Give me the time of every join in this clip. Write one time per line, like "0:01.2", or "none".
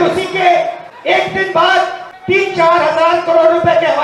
none